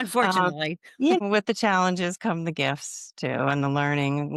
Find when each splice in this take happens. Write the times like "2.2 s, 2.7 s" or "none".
1.2 s

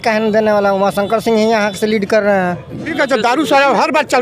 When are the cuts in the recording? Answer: 2.9 s

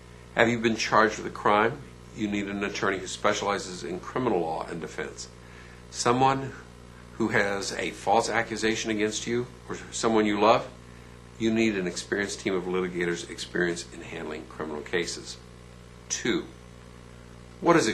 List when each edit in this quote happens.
4.7 s

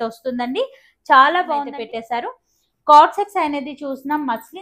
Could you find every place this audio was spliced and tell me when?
1.7 s

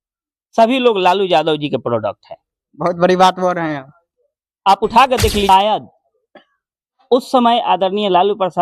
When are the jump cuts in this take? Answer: 5.5 s

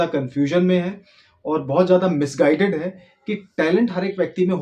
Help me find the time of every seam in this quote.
none

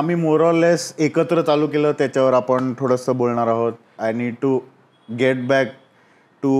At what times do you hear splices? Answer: 3.9 s

